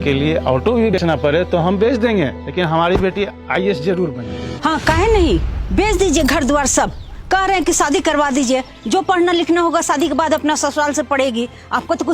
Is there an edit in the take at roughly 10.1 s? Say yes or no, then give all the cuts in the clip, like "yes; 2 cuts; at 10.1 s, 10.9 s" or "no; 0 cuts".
no; 2 cuts; at 0.9 s, 4.4 s